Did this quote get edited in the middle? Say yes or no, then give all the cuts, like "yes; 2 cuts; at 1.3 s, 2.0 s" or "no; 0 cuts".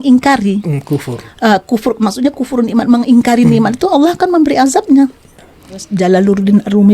yes; 1 cut; at 5.9 s